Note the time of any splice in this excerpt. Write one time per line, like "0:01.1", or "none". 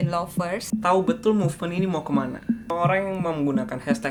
none